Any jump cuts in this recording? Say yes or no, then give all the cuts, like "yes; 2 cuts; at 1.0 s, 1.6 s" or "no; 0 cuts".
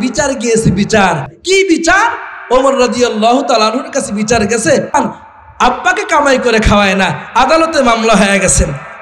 yes; 1 cut; at 1.3 s